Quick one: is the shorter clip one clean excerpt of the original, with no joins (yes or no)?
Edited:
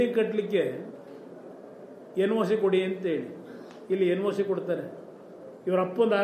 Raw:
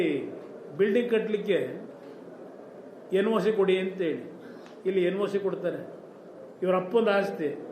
yes